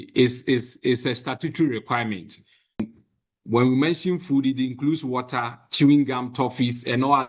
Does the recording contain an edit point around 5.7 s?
no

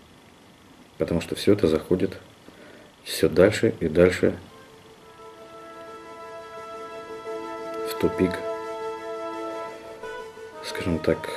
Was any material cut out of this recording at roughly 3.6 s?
yes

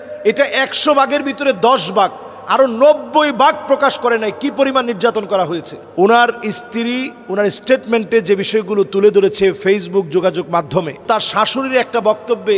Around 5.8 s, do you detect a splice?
yes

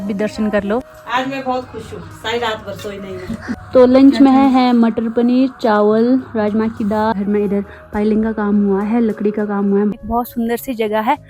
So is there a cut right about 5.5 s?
no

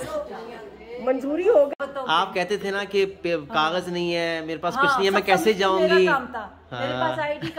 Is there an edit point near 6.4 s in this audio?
no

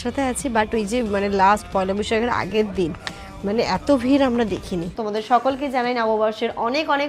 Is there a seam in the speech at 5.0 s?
yes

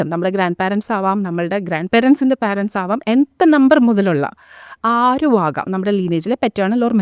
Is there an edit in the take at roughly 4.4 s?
no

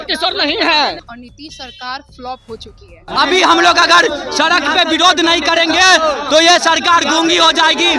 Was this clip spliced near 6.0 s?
no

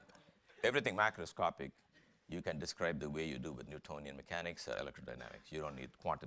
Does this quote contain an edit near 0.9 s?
yes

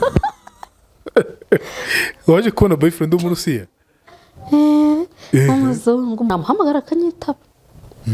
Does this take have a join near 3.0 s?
no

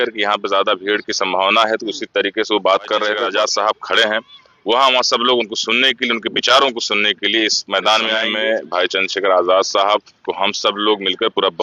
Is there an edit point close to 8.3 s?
yes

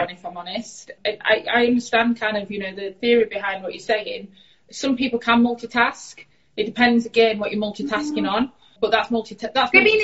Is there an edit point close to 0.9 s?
yes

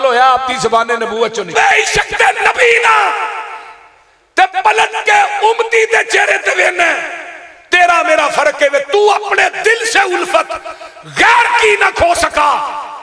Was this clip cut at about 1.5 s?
yes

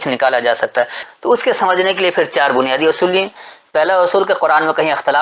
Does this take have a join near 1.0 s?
yes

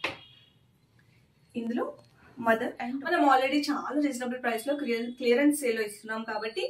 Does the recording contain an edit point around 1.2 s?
no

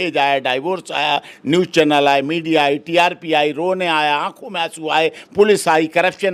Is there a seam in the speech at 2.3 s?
no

